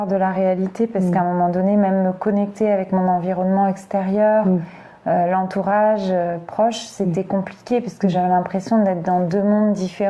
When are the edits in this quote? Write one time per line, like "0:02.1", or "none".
none